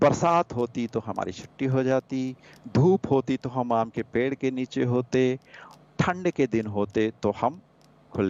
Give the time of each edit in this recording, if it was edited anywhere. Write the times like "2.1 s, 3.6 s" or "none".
none